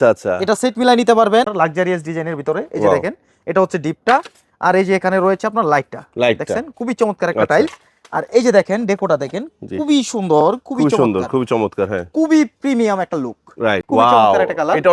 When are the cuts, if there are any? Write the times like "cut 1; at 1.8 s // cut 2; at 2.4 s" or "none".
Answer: cut 1; at 1.5 s // cut 2; at 13.8 s